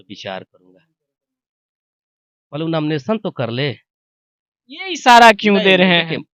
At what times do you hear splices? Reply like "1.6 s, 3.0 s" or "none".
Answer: none

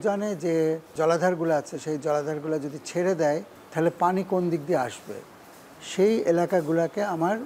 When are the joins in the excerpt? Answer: 0.9 s, 3.6 s

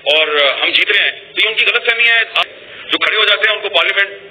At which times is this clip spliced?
2.5 s

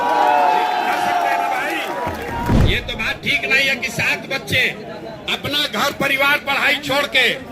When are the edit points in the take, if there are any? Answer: 2.5 s

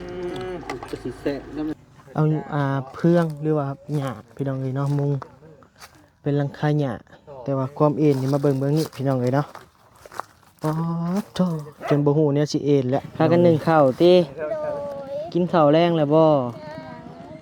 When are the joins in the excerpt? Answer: 1.8 s, 13.1 s

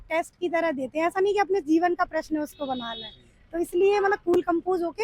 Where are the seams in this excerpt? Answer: none

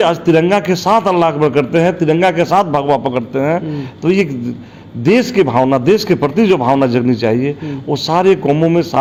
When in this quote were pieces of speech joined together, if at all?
none

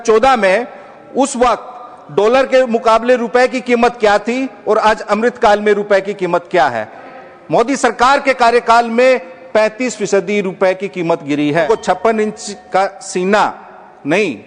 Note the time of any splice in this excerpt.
7.1 s, 11.7 s

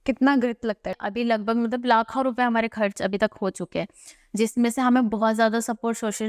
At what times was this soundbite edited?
1.0 s

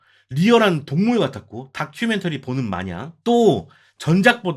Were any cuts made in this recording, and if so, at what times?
none

